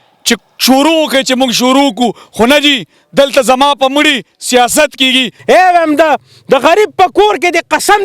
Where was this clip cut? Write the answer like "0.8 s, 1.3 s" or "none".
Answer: 5.3 s